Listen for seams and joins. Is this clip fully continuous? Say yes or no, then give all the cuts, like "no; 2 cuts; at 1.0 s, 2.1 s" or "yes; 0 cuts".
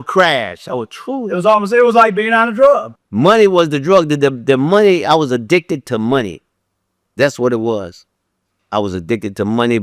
no; 1 cut; at 3.0 s